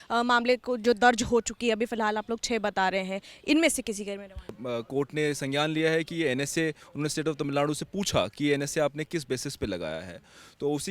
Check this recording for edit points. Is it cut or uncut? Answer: cut